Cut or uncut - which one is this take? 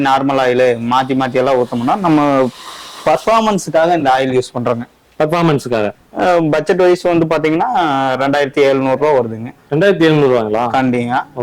cut